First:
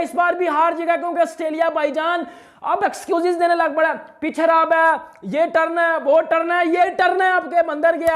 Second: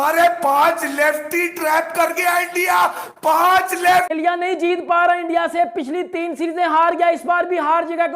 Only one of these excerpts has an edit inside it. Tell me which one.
second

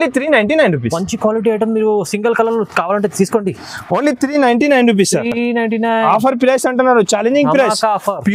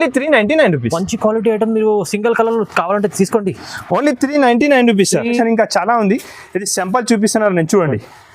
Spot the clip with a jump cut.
second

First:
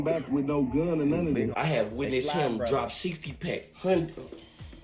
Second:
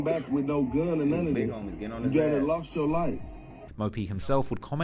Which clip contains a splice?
first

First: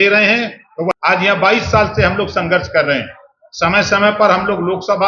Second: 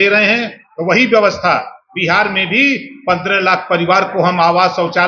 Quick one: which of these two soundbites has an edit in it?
first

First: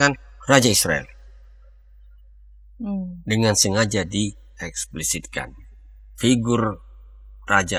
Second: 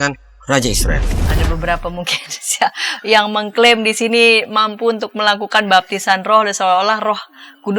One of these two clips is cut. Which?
second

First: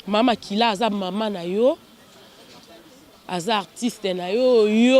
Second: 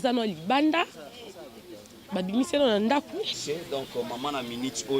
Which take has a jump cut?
second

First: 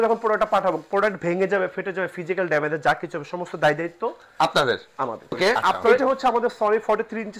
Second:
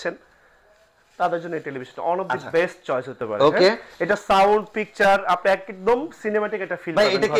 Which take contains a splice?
first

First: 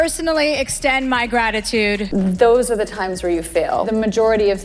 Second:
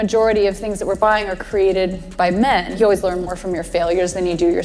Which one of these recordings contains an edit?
first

